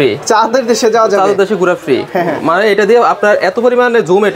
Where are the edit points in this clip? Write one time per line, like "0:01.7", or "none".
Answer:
none